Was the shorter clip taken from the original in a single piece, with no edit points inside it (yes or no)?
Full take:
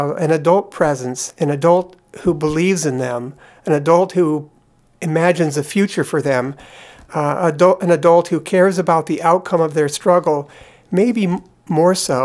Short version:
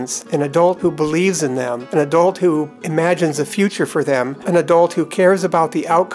no